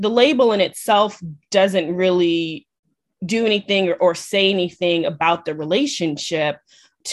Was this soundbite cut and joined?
no; 0 cuts

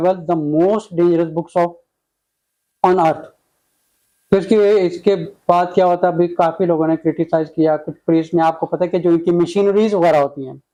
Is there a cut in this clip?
no; 0 cuts

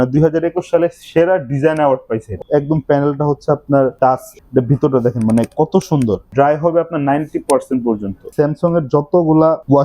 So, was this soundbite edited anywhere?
yes; 4 cuts; at 2.3 s, 3.9 s, 6.2 s, 8.3 s

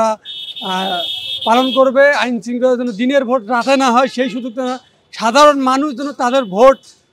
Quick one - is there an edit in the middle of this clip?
no; 0 cuts

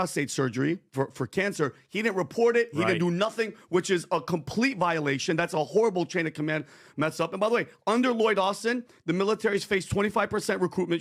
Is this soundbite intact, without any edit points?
yes; 0 cuts

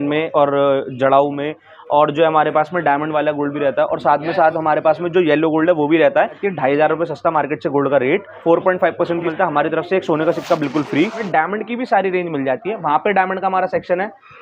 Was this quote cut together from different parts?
yes; 4 cuts; at 6.4 s, 8.3 s, 9.3 s, 11.2 s

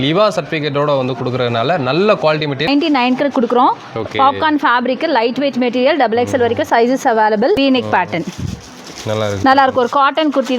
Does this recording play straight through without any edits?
no; 2 cuts; at 2.7 s, 7.6 s

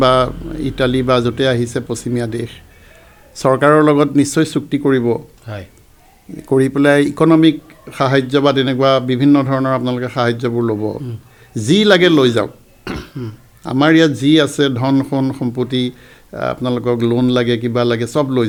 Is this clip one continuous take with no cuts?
yes; 0 cuts

